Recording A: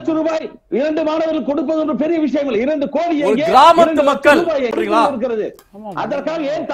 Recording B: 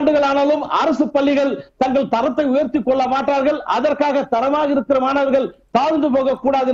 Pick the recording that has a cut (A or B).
A